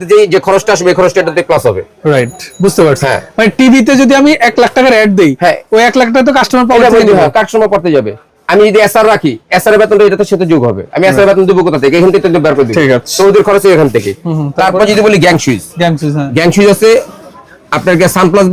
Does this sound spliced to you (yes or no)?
no